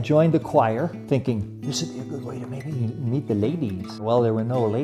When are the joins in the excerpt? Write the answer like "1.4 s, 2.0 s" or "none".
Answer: 1.0 s, 4.0 s